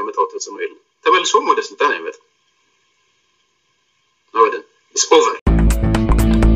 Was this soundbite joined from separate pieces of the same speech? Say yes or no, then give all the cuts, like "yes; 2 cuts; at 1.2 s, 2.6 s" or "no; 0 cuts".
yes; 1 cut; at 5.5 s